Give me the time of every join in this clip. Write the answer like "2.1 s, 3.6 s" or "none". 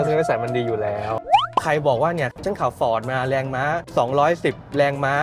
1.2 s, 2.4 s